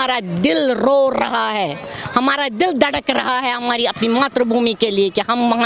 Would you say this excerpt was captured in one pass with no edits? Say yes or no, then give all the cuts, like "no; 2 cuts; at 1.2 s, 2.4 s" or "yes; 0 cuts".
yes; 0 cuts